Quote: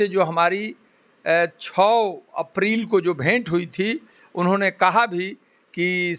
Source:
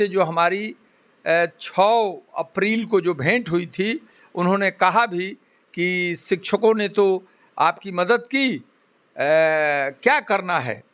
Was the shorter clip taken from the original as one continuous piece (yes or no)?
yes